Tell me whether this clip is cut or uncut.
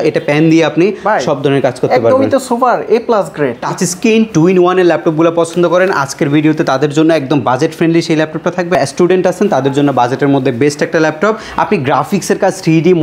cut